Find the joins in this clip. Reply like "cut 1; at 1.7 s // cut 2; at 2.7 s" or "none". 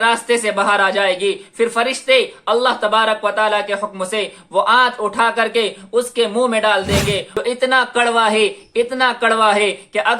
cut 1; at 7.3 s